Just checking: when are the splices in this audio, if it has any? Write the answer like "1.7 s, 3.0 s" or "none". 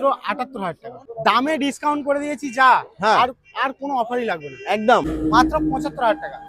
1.0 s, 5.1 s